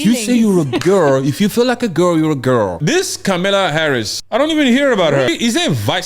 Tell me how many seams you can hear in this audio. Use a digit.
3